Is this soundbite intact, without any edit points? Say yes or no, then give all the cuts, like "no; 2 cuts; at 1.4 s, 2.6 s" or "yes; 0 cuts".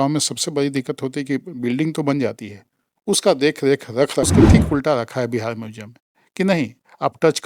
no; 1 cut; at 4.2 s